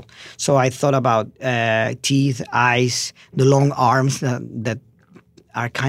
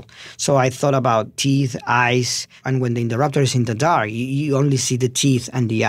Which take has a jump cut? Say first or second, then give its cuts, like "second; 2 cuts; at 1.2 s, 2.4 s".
second; 2 cuts; at 1.3 s, 2.6 s